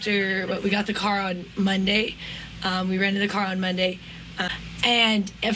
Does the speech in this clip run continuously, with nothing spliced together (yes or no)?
no